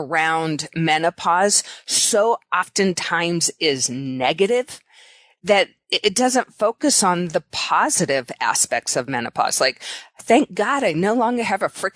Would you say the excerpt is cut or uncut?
uncut